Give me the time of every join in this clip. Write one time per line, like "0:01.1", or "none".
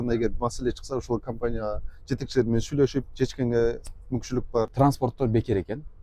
0:04.7